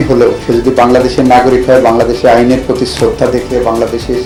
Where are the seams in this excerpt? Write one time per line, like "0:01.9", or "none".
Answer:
none

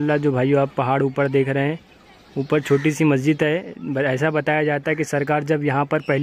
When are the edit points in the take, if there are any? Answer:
none

